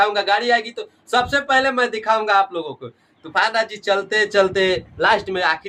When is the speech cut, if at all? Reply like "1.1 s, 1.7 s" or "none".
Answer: none